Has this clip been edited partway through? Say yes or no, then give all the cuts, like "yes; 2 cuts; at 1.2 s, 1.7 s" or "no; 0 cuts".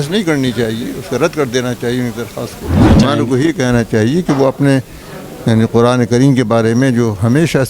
yes; 1 cut; at 2.8 s